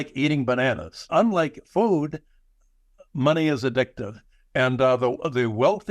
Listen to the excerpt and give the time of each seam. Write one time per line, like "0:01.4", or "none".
0:01.1